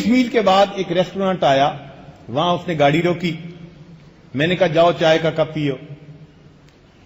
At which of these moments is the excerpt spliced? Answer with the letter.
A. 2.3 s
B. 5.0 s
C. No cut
B